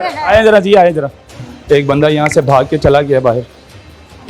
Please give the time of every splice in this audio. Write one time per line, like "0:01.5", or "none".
0:01.5